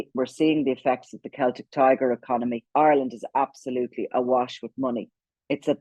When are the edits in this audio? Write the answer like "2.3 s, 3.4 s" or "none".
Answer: 2.6 s